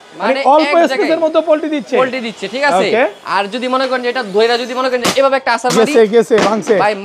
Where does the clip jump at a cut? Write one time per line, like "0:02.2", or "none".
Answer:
none